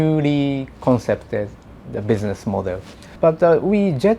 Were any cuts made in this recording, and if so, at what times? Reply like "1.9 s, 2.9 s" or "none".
3.0 s